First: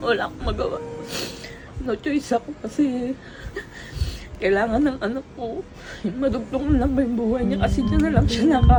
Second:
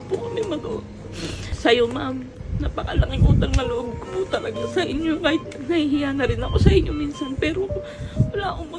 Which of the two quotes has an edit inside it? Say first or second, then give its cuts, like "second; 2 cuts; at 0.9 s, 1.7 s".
second; 1 cut; at 1.5 s